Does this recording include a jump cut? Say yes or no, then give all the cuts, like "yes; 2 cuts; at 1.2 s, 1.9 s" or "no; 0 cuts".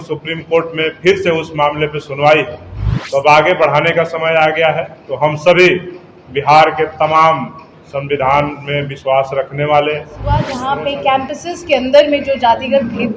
yes; 1 cut; at 10.3 s